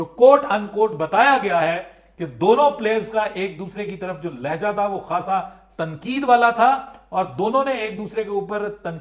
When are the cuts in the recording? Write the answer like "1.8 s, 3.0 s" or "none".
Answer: none

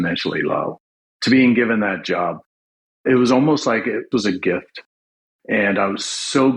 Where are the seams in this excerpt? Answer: 4.1 s

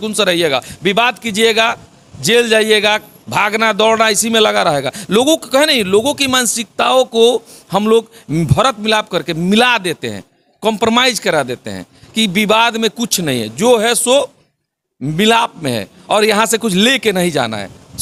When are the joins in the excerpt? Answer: none

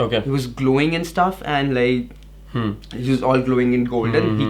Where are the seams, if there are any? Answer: none

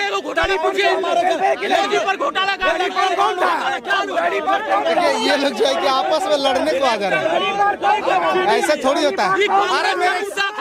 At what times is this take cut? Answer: none

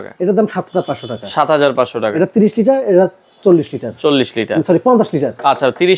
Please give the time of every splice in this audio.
none

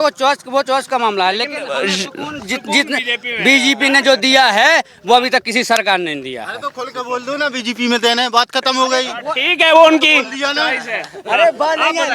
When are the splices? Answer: none

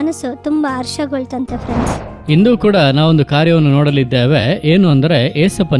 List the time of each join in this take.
2.1 s

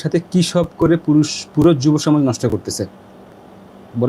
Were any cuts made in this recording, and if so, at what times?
none

